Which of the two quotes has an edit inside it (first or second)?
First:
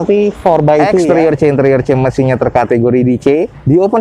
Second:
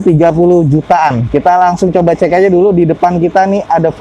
first